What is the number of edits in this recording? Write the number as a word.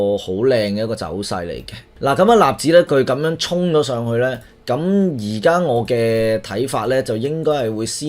one